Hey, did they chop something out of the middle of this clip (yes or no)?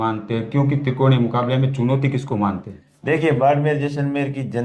no